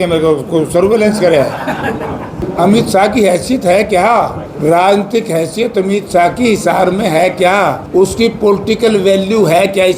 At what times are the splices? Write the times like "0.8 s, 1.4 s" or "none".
2.4 s, 4.4 s, 7.8 s